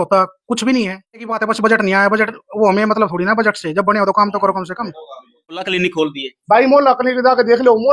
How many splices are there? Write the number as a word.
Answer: two